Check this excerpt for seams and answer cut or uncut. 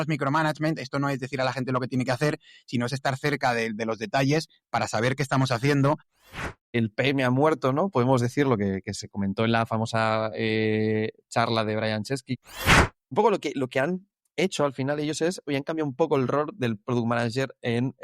cut